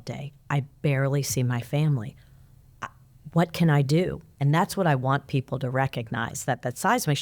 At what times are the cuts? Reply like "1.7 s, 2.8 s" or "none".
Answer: 4.3 s